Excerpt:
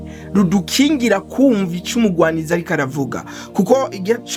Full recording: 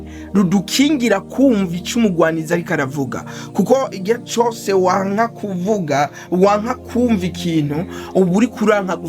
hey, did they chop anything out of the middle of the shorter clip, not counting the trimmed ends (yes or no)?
no